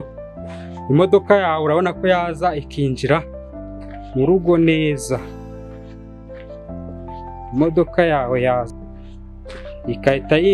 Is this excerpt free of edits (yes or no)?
yes